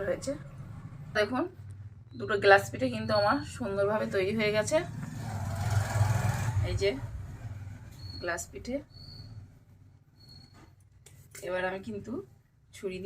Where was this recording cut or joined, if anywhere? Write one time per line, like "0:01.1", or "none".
0:01.2